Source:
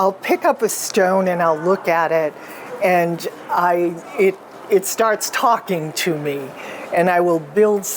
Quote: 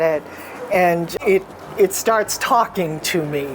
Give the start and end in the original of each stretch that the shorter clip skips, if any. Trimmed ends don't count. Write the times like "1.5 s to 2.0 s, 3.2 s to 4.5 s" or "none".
3.2 s to 4.1 s

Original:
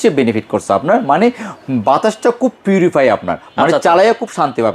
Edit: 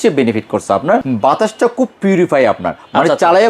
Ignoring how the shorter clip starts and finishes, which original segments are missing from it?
1.0 s to 1.7 s

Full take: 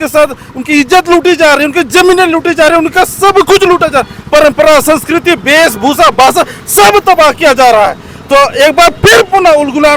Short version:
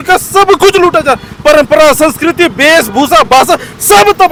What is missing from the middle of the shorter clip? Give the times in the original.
none

